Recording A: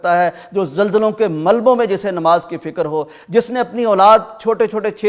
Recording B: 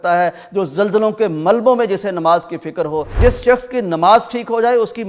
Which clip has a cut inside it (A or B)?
B